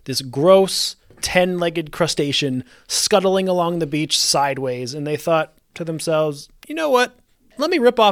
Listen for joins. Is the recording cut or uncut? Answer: cut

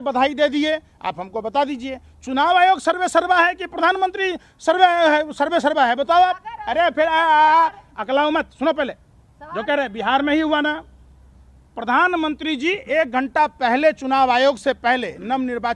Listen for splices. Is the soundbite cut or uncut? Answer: uncut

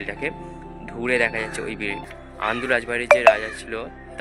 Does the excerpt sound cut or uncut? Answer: cut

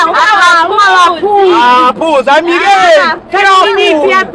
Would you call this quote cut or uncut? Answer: uncut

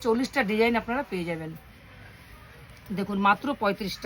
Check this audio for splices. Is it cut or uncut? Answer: uncut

